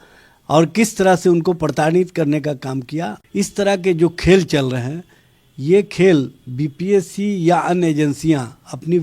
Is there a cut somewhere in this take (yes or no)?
yes